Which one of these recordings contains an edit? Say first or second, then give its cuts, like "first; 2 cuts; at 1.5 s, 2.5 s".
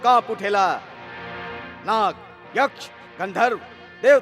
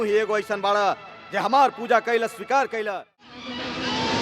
second; 1 cut; at 3.3 s